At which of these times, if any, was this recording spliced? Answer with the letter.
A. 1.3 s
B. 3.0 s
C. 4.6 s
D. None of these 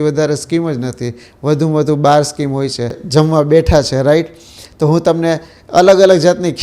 B